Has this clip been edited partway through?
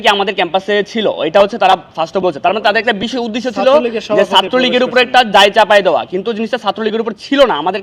no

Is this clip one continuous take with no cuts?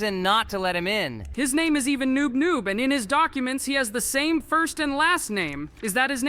no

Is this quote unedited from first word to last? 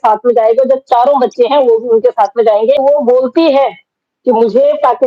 no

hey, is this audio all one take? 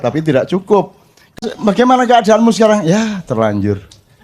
no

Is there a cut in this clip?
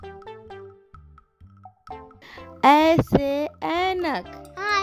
yes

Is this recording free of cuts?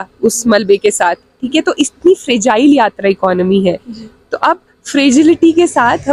yes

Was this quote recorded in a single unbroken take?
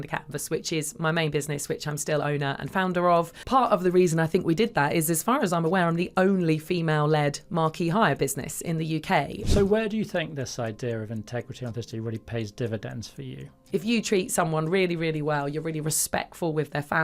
no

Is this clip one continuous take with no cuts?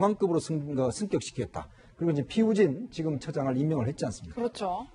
no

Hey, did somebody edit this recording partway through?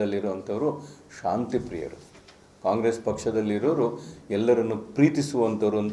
no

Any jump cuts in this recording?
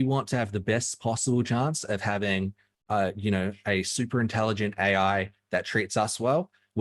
no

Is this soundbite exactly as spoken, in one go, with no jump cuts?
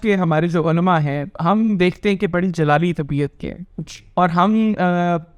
yes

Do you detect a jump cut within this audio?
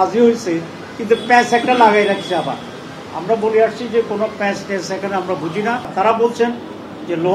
yes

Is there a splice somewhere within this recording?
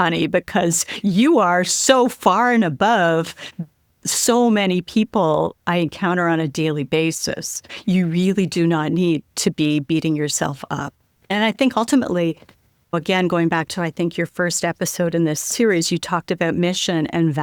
no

